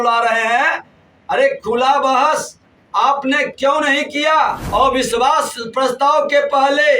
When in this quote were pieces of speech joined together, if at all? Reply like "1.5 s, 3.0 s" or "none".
4.6 s